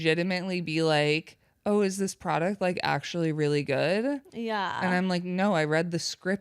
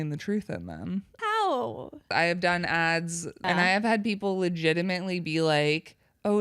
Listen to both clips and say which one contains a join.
second; 3 cuts; at 1.2 s, 2.1 s, 3.4 s

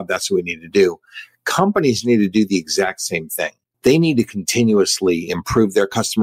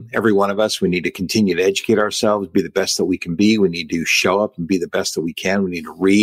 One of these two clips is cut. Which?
first; 1 cut; at 3.6 s

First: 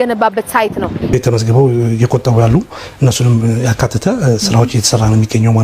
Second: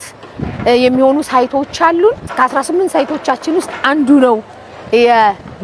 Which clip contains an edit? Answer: first; 1 cut; at 1.1 s

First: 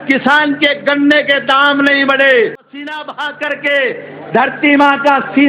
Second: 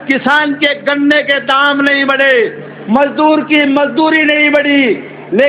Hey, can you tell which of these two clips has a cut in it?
first; 1 cut; at 2.7 s

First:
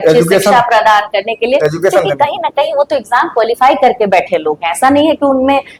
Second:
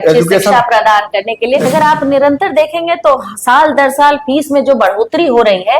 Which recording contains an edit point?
second; 1 cut; at 1.7 s

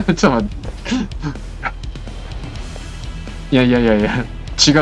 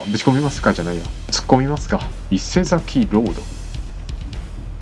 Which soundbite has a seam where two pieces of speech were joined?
second; 2 cuts; at 2.1 s, 3.9 s

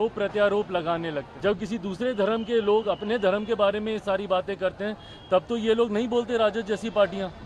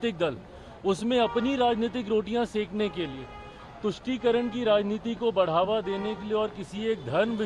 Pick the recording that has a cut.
first; 1 cut; at 1.3 s

